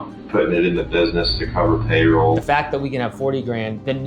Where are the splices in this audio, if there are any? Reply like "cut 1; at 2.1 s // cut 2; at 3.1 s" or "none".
cut 1; at 2.4 s